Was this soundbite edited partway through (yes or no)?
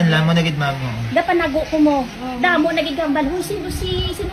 no